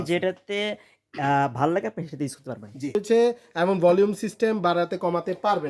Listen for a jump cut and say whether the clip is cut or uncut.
cut